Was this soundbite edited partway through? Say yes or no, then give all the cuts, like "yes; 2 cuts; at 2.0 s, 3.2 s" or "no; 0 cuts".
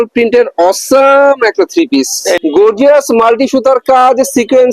yes; 1 cut; at 2.4 s